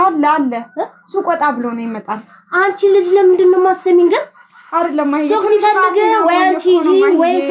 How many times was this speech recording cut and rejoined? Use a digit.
0